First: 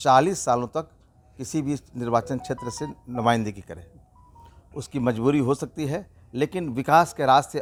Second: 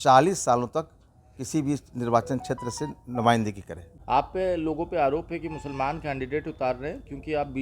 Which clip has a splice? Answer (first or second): second